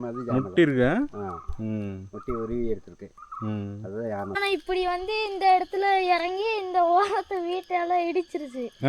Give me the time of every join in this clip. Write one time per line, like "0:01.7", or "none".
0:04.3